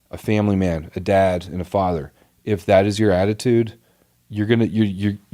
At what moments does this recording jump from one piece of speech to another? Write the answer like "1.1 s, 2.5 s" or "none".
none

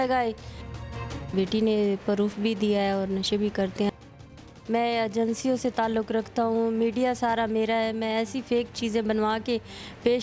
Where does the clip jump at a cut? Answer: 0.9 s, 3.9 s

